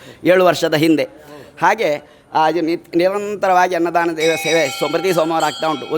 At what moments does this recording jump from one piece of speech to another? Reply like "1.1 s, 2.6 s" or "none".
none